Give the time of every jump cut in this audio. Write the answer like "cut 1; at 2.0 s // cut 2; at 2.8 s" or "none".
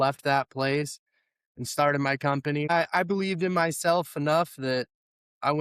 cut 1; at 2.7 s